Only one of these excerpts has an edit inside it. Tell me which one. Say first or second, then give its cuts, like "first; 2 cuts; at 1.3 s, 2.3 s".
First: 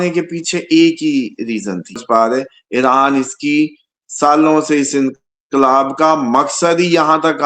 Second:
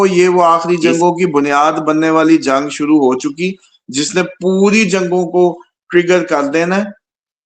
first; 1 cut; at 2.0 s